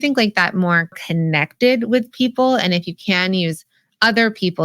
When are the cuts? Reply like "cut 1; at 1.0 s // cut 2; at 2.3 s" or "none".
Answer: cut 1; at 1.0 s